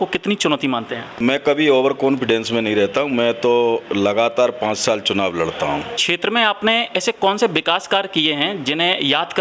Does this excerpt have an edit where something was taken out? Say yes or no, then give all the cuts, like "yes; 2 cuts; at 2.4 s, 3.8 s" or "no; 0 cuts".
yes; 2 cuts; at 1.2 s, 6.0 s